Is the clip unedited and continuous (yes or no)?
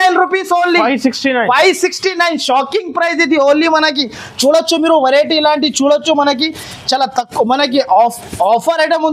yes